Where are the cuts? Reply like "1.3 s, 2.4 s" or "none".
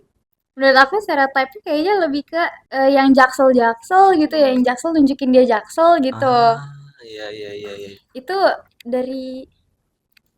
2.6 s